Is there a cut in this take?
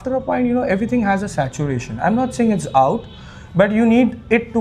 no; 0 cuts

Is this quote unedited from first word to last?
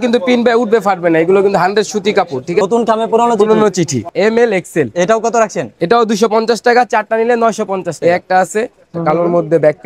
no; 3 cuts; at 2.6 s, 4.1 s, 7.9 s

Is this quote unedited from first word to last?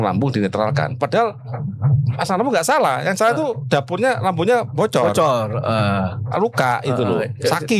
yes; 0 cuts

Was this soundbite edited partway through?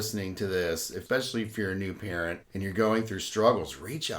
yes; 2 cuts; at 1.0 s, 2.5 s

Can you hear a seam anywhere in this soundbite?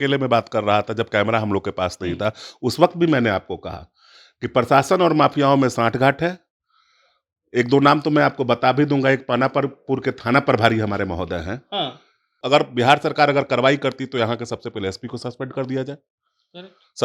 yes; 1 cut; at 12.4 s

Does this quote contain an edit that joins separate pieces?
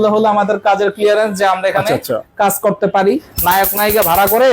yes; 1 cut; at 3.3 s

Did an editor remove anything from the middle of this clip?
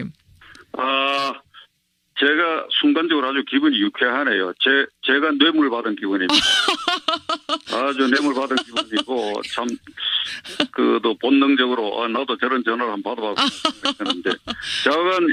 no; 0 cuts

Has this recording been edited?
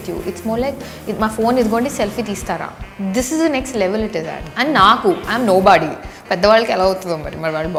no; 0 cuts

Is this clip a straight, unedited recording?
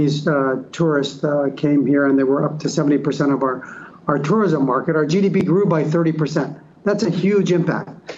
yes; 0 cuts

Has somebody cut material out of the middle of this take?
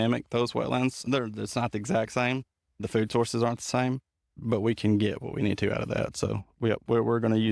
yes; 3 cuts; at 1.0 s, 2.8 s, 4.3 s

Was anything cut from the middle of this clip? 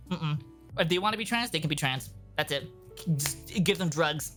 no; 0 cuts

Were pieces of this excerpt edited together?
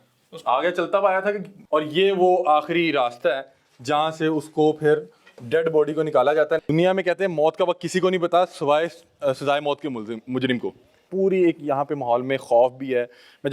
yes; 3 cuts; at 1.5 s, 6.7 s, 11.0 s

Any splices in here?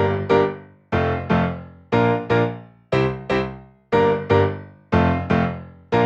no; 0 cuts

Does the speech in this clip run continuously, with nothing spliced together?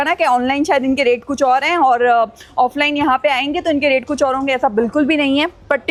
yes; 0 cuts

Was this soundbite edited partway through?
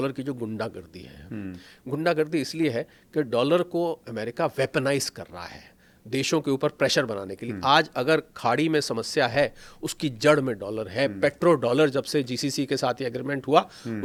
no; 0 cuts

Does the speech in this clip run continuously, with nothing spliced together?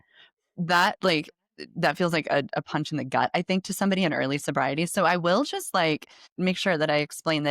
no; 1 cut; at 6.2 s

